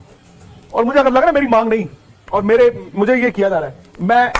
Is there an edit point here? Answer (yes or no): no